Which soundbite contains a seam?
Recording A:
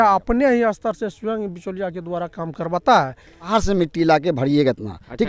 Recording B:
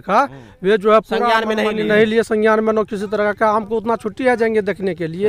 A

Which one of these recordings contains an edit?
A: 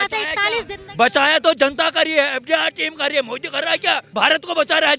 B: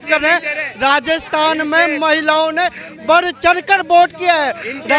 A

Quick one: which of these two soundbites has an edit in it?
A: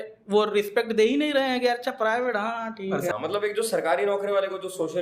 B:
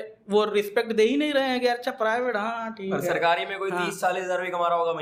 A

